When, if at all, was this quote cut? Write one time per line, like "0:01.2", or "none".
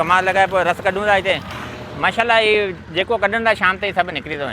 0:01.5

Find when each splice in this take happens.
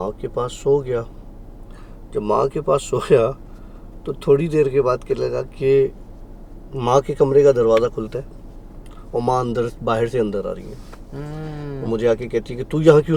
none

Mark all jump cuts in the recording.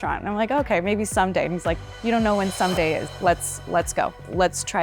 0:03.1

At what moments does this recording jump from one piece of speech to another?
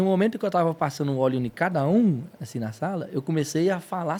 none

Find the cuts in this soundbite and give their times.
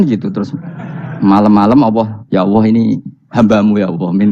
0:02.2

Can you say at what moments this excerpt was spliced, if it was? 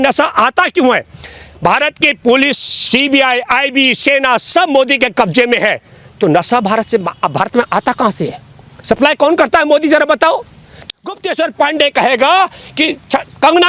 0:10.7

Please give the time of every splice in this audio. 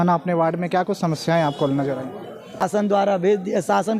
0:02.8

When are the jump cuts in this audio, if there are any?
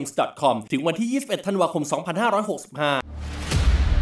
0:03.1

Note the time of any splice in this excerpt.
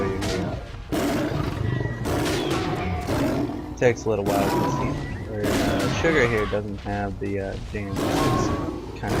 none

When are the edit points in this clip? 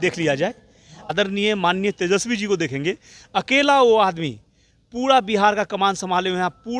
0:01.1

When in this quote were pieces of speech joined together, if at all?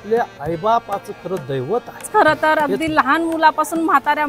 0:02.1

